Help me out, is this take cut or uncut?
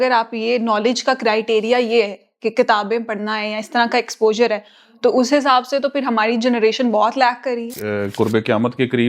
cut